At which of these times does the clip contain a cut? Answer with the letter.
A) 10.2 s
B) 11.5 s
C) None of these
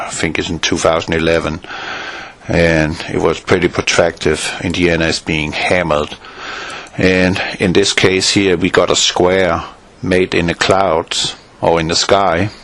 A